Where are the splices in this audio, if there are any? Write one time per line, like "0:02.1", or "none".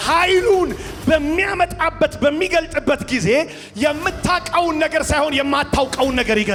none